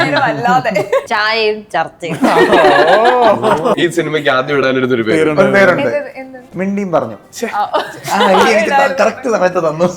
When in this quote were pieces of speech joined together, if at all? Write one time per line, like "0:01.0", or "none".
0:01.0
0:03.8